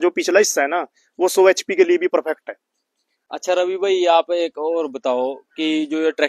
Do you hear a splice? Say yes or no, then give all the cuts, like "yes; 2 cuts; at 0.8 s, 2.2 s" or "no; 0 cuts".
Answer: no; 0 cuts